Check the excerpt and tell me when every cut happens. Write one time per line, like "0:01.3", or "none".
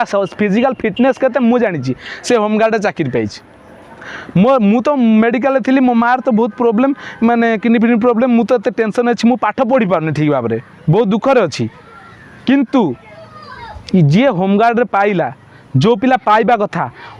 none